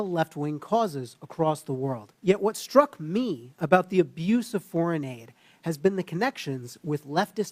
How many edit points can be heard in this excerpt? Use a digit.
1